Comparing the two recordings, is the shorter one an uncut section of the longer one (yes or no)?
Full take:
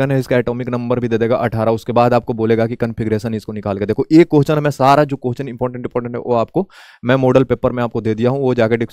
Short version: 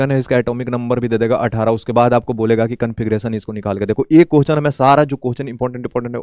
yes